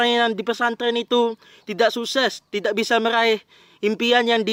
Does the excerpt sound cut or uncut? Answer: uncut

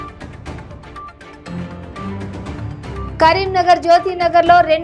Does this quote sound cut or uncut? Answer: cut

